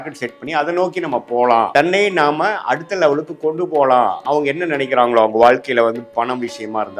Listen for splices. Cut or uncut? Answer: cut